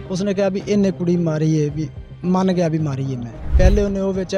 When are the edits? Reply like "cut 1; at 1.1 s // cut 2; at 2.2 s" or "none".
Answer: cut 1; at 3.4 s